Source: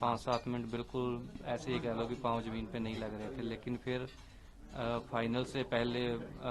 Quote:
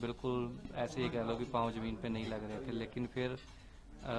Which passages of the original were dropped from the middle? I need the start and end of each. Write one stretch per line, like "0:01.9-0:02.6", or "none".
none